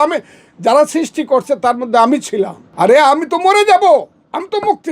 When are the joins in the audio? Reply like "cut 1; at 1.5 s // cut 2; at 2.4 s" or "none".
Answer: cut 1; at 2.6 s